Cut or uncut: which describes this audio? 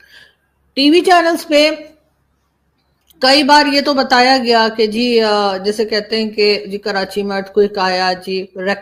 uncut